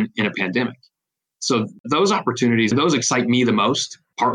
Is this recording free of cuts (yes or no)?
no